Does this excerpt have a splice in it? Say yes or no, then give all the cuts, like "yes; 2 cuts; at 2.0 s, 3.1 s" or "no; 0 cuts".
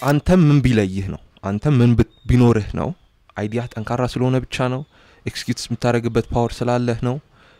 no; 0 cuts